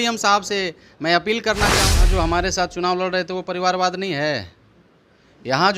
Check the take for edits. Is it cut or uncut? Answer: cut